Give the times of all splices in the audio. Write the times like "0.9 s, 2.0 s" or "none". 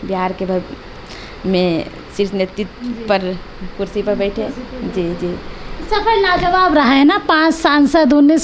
none